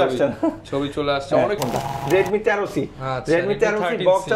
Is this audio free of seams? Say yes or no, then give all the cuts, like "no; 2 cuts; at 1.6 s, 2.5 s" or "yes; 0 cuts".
no; 1 cut; at 1.6 s